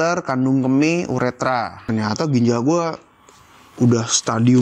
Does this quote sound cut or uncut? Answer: cut